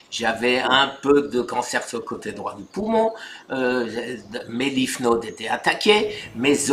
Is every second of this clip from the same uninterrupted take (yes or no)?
yes